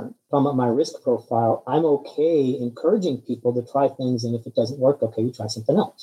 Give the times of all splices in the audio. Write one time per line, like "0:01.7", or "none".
none